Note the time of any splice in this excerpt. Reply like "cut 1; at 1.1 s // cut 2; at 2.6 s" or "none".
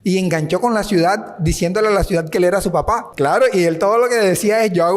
cut 1; at 3.1 s